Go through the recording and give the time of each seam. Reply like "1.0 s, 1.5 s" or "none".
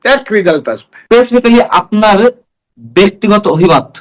0.9 s